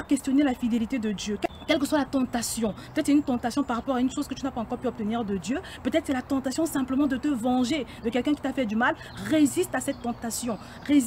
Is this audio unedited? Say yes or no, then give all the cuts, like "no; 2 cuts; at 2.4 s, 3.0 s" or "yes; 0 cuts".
no; 1 cut; at 1.4 s